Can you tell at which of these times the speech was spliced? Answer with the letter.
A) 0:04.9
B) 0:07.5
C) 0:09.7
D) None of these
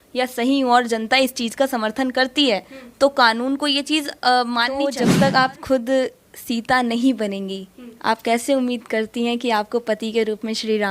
A